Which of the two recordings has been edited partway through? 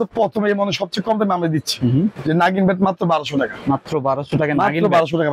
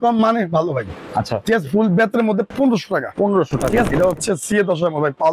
second; 2 cuts; at 2.5 s, 3.9 s

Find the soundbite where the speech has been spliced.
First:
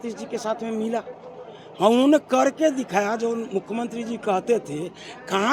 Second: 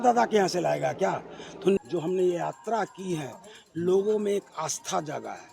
second; 1 cut; at 1.8 s

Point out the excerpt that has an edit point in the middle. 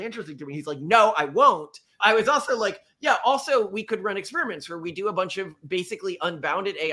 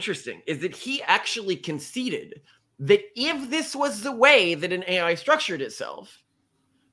first; 1 cut; at 1.8 s

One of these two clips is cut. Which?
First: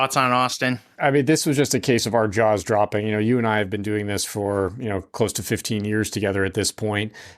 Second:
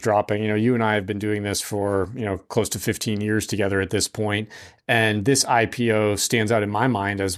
first; 1 cut; at 1.0 s

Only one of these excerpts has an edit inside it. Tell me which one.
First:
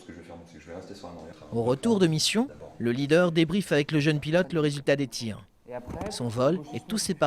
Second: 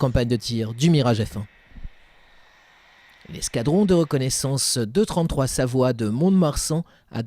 first; 1 cut; at 5.9 s

